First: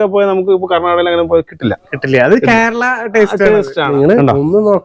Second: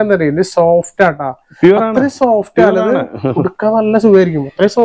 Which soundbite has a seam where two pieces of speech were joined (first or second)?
first